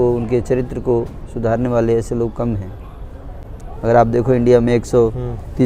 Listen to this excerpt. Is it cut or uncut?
uncut